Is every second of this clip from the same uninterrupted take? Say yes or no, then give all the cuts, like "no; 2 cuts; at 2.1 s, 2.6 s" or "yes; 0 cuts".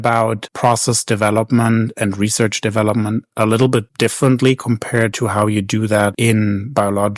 no; 1 cut; at 6.2 s